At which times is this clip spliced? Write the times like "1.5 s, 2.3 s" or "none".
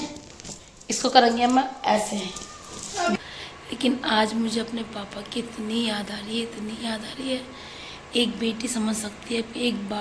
3.1 s

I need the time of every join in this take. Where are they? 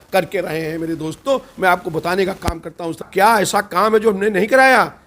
3.0 s

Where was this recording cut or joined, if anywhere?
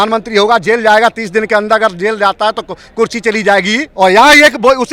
3.9 s

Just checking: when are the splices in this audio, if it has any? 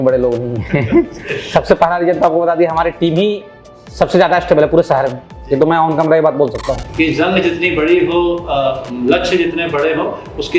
6.9 s

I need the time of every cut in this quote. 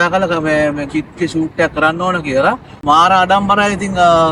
2.7 s

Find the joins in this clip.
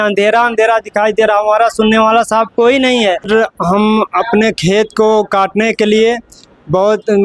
3.3 s

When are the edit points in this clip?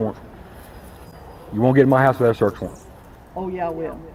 none

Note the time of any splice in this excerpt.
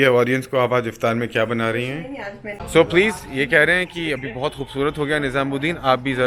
2.7 s

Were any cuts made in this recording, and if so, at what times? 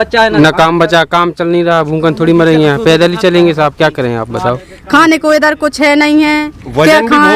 4.7 s

